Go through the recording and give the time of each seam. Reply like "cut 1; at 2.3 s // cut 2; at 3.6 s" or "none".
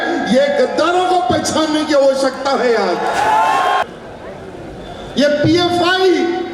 cut 1; at 3.8 s